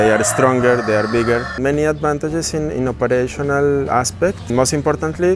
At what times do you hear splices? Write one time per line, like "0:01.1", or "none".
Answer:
0:01.5
0:04.5

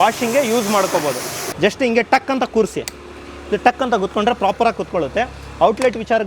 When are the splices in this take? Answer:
0:01.4

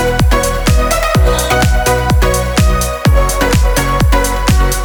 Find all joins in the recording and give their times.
none

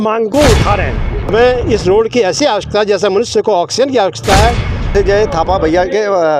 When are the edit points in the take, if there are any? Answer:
0:01.1
0:04.9

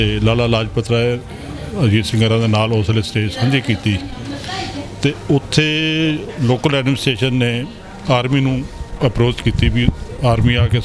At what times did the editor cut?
none

